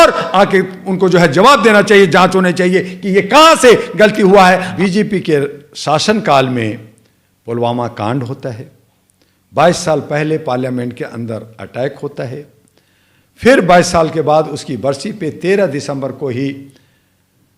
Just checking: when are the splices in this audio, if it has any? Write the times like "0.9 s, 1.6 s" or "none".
4.7 s